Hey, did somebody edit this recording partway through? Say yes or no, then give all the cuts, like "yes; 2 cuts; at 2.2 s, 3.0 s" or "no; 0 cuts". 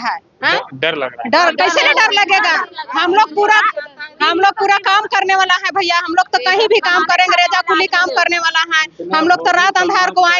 no; 0 cuts